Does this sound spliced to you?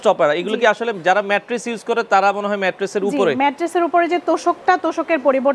no; 0 cuts

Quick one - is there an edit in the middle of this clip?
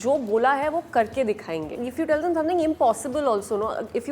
no; 0 cuts

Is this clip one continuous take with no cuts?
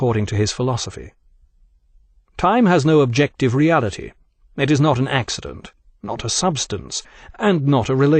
yes; 0 cuts

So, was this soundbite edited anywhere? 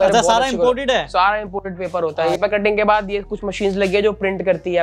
yes; 1 cut; at 2.4 s

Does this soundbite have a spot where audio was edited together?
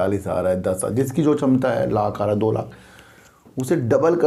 no; 0 cuts

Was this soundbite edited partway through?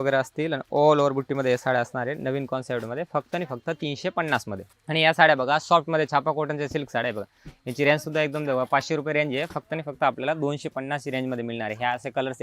no; 0 cuts

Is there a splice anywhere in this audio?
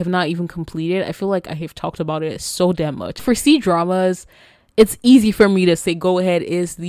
yes; 2 cuts; at 3.2 s, 5.8 s

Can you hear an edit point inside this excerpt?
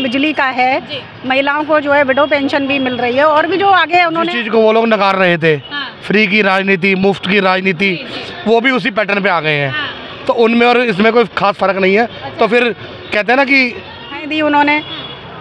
yes; 2 cuts; at 4.3 s, 14.2 s

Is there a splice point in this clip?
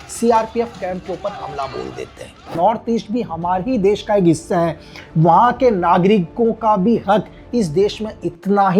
yes; 1 cut; at 2.5 s

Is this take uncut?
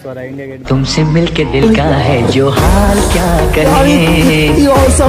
yes; 0 cuts

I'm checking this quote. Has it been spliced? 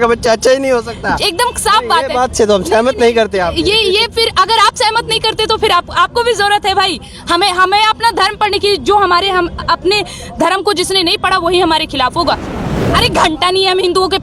yes; 1 cut; at 12.6 s

